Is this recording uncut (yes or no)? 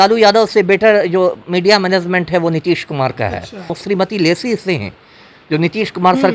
no